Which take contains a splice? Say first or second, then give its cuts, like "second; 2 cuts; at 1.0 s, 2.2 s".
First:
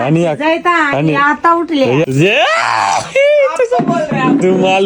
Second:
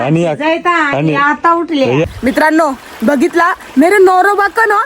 second; 1 cut; at 2.1 s